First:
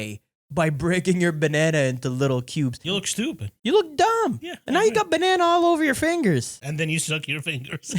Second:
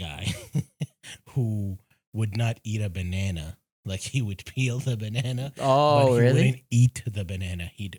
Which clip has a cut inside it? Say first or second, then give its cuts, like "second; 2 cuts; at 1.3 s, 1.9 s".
first; 2 cuts; at 2.8 s, 6.6 s